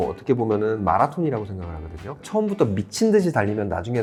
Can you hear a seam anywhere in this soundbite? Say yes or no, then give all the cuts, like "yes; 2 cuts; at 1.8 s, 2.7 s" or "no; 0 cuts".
no; 0 cuts